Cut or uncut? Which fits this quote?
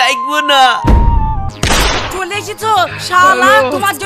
cut